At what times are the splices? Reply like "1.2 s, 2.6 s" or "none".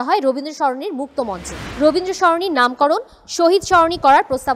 1.7 s